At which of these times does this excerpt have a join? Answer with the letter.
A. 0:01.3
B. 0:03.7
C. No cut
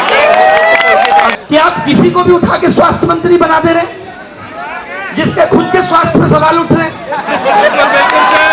A